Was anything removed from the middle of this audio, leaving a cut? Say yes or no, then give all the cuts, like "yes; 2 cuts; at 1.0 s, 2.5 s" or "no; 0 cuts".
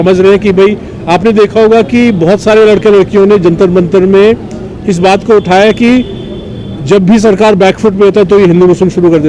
no; 0 cuts